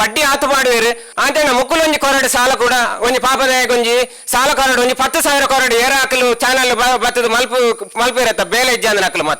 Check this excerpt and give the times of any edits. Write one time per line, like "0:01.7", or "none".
0:01.1